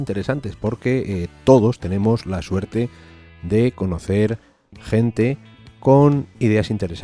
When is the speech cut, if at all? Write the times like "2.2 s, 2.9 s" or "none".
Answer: 1.8 s